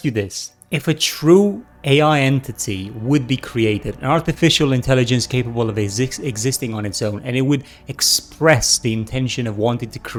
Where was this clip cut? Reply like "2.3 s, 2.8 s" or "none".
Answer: none